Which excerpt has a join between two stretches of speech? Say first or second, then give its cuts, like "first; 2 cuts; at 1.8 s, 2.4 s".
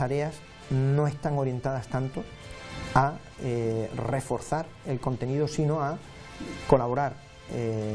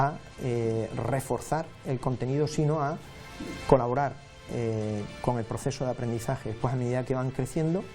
second; 1 cut; at 6.6 s